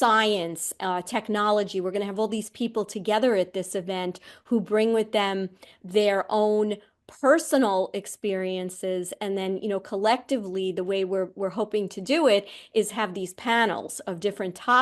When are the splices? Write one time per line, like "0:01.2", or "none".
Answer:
none